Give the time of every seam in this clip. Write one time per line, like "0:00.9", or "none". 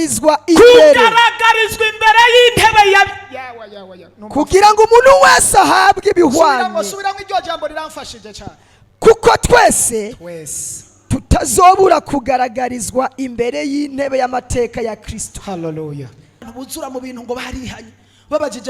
0:16.5